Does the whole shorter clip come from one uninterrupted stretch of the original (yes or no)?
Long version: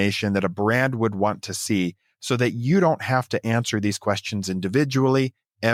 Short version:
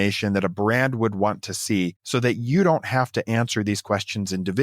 no